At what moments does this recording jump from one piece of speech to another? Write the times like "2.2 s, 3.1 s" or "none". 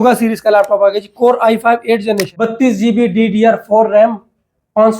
2.3 s